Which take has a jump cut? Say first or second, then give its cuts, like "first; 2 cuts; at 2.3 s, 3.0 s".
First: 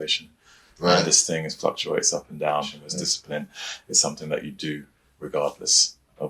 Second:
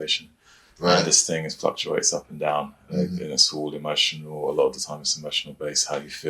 first; 1 cut; at 2.8 s